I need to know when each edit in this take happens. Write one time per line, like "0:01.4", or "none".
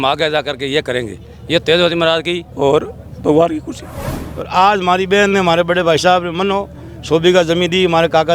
0:02.4
0:04.1

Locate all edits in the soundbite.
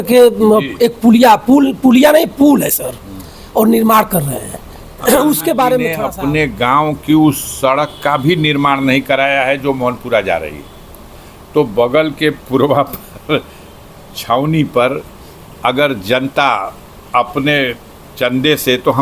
0:06.0

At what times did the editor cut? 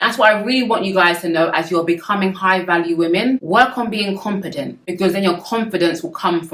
none

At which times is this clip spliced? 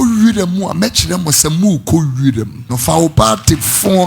0:02.7

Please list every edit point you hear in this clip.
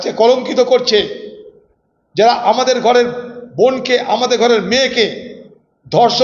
none

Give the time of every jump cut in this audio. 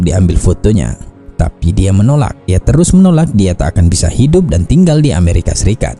0:02.5

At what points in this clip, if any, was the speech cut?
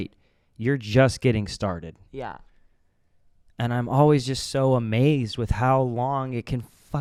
none

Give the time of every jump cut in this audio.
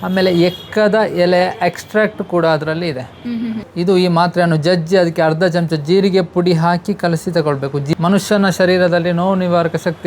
0:03.7
0:07.9

